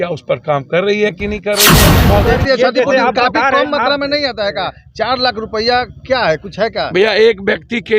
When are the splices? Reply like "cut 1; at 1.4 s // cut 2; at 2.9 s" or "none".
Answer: cut 1; at 1.7 s